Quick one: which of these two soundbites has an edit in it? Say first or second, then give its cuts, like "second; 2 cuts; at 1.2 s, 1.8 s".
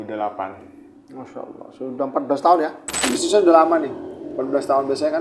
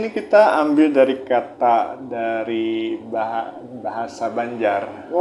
first; 1 cut; at 3.0 s